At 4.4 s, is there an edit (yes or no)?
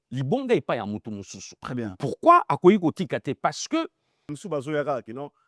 yes